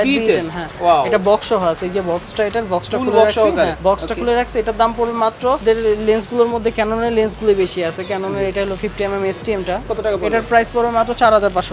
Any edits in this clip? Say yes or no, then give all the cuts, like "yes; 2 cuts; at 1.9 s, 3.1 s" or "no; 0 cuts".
yes; 2 cuts; at 5.6 s, 9.9 s